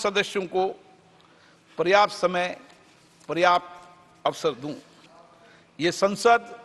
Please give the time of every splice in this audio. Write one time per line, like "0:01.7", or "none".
none

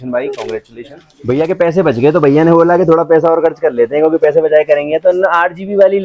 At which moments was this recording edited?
0:01.1

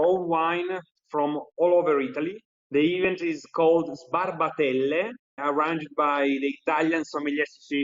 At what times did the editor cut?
none

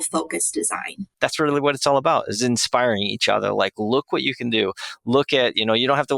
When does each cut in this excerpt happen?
0:01.0

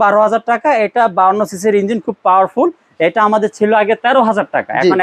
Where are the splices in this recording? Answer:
none

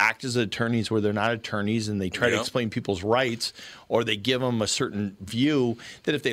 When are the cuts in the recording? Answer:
none

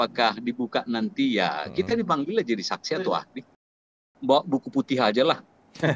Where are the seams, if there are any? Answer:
0:03.8

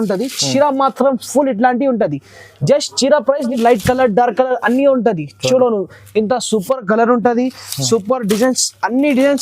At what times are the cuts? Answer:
0:03.5

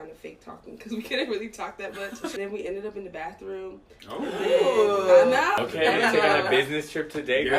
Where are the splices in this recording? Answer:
0:05.6

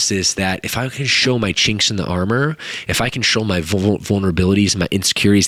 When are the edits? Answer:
none

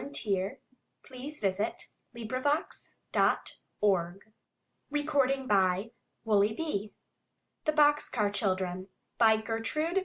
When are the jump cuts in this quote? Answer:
none

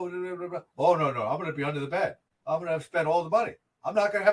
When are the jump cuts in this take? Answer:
0:02.3

